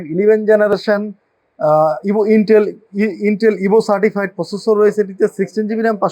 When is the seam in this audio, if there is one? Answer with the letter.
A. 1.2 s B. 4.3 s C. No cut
C